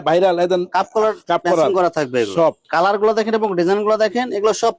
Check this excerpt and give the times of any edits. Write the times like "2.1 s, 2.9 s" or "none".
2.6 s